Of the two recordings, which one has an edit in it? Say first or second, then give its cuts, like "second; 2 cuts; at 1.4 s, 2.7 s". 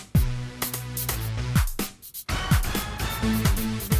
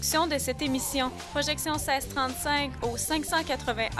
first; 1 cut; at 2.1 s